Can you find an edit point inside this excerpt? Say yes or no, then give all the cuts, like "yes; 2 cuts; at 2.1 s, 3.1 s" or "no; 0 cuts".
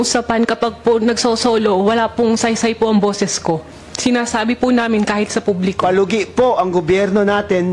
no; 0 cuts